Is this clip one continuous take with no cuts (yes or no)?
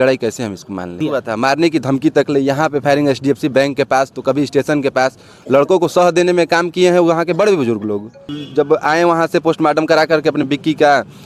no